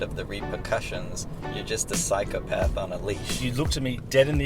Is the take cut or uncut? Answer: cut